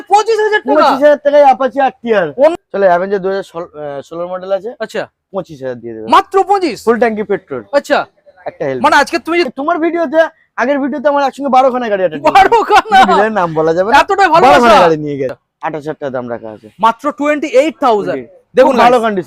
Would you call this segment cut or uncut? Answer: cut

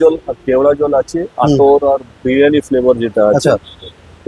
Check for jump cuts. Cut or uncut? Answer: uncut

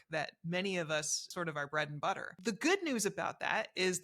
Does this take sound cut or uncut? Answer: cut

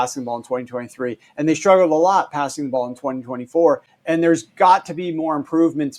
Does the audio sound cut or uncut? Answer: uncut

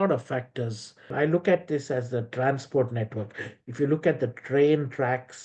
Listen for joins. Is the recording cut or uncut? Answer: cut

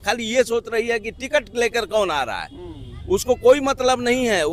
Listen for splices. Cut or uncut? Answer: uncut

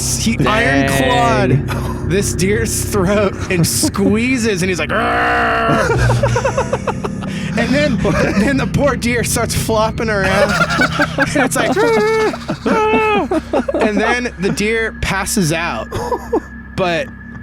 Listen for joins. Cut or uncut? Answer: uncut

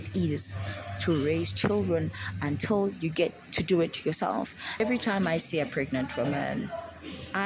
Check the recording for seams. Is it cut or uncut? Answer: cut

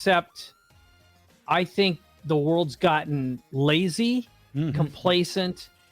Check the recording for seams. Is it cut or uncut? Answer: uncut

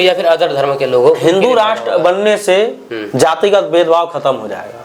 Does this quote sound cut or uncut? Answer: uncut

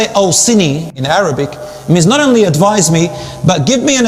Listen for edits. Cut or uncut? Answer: cut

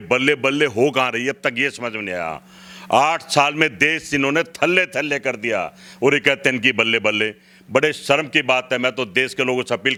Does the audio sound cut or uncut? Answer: uncut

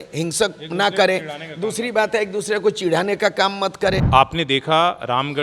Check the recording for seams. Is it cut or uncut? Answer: cut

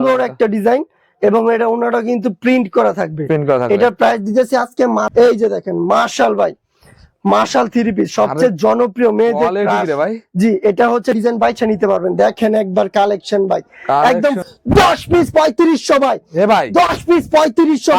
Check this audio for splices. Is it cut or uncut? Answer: cut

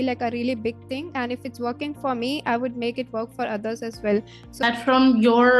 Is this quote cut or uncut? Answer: cut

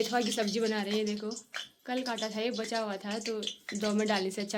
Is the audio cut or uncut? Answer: uncut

